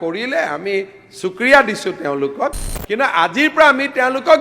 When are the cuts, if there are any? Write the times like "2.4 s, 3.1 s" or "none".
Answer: 2.7 s